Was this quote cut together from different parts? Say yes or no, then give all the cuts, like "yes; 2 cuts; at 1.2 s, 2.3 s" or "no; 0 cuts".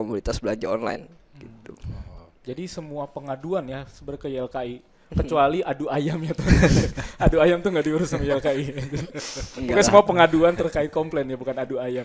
no; 0 cuts